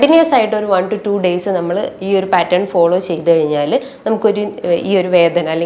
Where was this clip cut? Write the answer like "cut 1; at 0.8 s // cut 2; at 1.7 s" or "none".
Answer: none